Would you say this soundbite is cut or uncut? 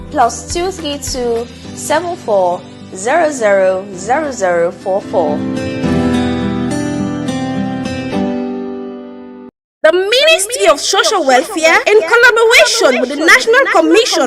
cut